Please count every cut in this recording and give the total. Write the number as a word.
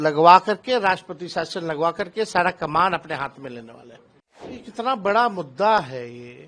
one